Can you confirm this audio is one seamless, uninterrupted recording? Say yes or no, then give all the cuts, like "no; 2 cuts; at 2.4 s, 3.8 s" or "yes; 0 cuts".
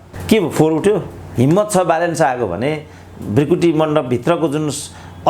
no; 1 cut; at 1.2 s